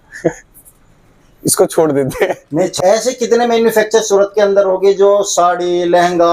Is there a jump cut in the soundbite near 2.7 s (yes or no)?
yes